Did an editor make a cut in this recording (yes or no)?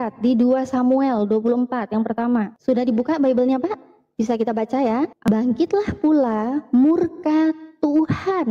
yes